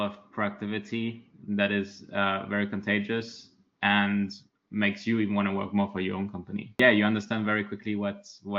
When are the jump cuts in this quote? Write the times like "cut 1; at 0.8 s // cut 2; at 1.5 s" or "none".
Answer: cut 1; at 6.8 s